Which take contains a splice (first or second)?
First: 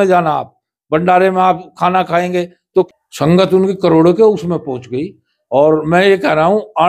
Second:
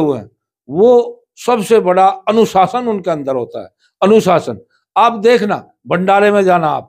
first